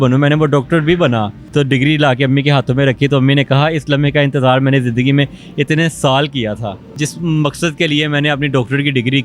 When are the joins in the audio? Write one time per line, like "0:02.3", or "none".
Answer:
0:01.4
0:07.0